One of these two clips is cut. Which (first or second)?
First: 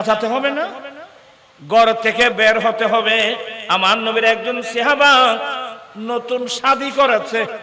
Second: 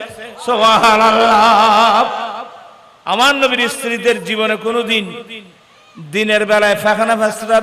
first